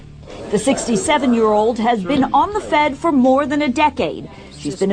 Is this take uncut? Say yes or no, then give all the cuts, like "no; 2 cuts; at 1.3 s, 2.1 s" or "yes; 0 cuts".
no; 1 cut; at 1.7 s